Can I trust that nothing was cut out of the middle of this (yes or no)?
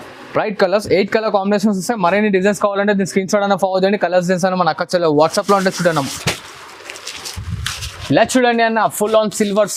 yes